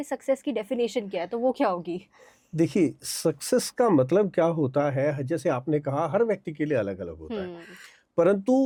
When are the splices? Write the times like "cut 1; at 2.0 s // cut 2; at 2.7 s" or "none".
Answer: none